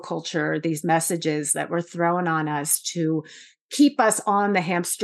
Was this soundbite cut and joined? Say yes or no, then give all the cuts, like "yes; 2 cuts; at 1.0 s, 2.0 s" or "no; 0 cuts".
no; 0 cuts